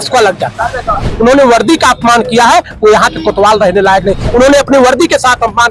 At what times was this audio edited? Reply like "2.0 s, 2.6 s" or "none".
1.0 s, 4.3 s